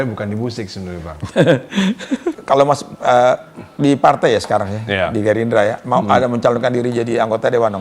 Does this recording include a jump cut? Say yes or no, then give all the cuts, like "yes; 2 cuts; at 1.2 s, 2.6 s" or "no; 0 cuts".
yes; 1 cut; at 2.3 s